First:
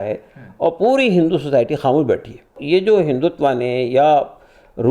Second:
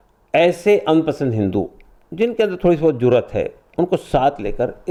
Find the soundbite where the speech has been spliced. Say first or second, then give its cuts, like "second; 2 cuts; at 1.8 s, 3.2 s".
first; 1 cut; at 2.6 s